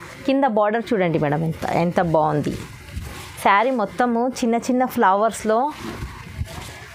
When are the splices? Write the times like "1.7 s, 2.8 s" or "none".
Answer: none